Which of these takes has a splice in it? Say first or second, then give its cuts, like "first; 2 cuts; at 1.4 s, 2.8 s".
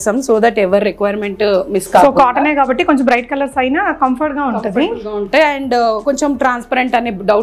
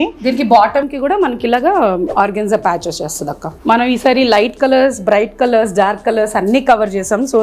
second; 2 cuts; at 2.1 s, 3.5 s